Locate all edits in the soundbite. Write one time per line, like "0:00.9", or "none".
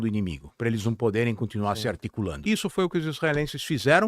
0:02.4